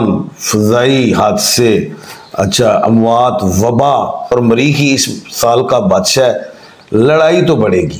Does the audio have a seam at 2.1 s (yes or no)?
no